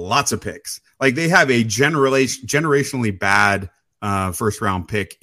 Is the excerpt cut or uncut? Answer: uncut